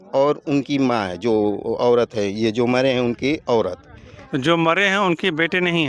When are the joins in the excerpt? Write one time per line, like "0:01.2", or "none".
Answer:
none